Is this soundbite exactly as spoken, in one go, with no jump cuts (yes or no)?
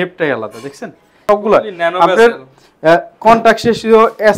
no